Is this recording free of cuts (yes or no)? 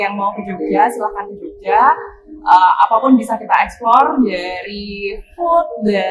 yes